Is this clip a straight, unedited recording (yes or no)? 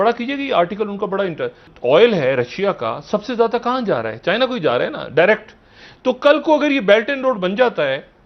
no